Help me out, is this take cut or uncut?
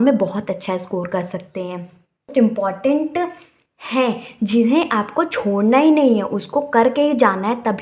cut